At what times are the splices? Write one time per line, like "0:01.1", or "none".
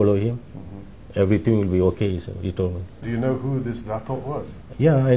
0:03.0